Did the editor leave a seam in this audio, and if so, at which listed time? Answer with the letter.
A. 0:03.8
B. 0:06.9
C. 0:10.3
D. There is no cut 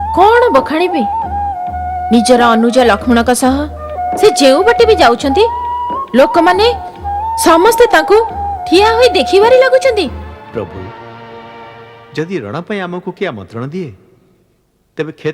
C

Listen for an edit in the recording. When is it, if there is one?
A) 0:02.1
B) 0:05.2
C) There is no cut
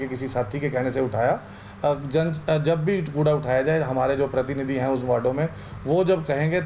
C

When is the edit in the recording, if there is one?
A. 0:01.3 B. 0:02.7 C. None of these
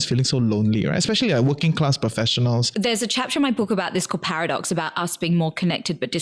B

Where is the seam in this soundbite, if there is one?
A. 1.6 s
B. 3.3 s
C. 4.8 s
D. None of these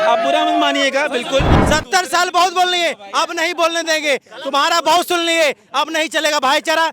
A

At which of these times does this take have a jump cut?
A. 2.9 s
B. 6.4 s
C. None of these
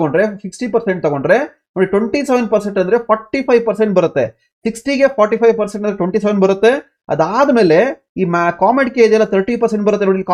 C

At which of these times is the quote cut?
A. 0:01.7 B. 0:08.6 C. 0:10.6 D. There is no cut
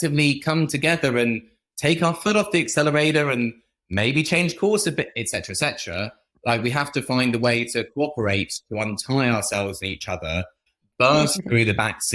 C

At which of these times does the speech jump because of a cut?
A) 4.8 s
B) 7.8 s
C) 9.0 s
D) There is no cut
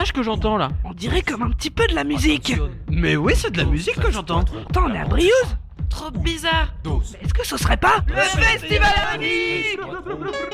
C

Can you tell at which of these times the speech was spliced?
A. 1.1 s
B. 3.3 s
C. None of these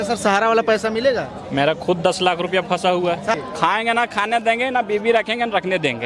B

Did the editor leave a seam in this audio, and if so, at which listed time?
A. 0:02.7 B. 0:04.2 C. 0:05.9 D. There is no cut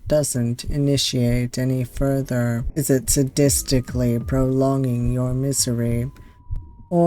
A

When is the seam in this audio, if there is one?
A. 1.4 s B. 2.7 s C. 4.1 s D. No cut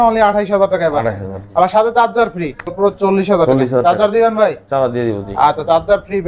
B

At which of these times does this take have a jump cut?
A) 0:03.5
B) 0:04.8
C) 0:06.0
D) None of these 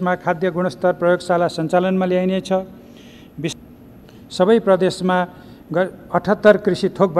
A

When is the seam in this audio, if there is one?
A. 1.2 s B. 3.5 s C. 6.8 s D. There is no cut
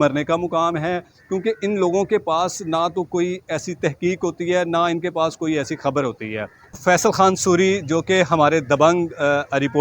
C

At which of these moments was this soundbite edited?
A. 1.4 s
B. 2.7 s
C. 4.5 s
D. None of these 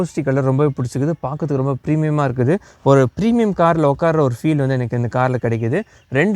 D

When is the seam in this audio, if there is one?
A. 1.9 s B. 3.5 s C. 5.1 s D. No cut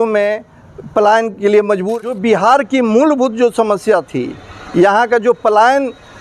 A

